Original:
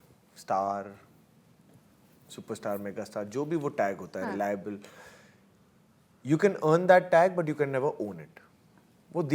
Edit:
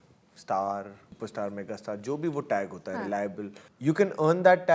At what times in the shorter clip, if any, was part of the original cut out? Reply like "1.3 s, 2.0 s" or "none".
1.0 s, 3.6 s